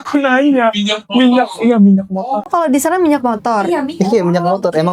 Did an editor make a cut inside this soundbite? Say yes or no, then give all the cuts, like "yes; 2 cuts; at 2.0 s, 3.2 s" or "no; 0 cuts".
no; 0 cuts